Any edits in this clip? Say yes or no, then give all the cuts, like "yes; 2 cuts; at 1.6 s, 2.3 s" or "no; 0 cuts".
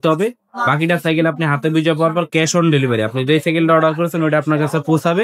no; 0 cuts